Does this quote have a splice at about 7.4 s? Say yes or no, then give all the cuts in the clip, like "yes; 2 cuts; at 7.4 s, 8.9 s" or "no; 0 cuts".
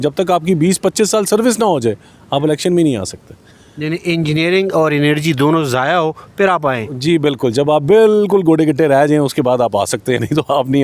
no; 0 cuts